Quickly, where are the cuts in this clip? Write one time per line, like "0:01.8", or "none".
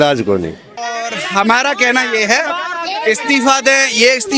0:01.0